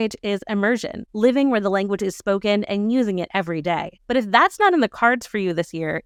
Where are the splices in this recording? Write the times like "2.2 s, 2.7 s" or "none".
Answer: none